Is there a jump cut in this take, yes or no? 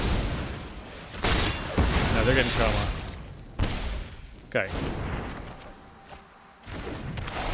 no